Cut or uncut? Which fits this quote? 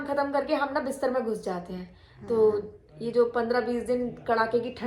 uncut